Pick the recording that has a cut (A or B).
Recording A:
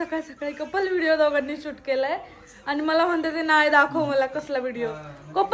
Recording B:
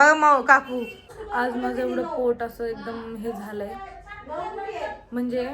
B